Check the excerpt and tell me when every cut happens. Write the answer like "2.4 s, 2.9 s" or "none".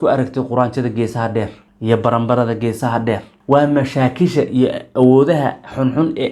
1.6 s, 3.3 s